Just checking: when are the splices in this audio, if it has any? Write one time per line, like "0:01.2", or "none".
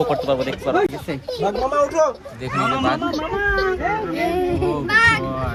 none